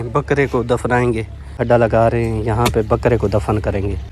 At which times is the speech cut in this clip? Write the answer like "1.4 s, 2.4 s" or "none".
1.6 s